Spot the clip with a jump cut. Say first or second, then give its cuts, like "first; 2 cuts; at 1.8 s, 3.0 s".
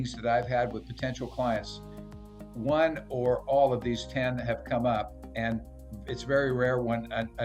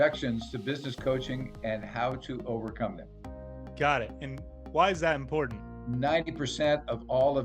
second; 1 cut; at 5.6 s